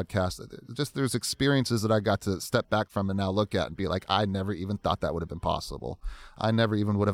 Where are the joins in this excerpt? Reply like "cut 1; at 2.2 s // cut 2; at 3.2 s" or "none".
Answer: none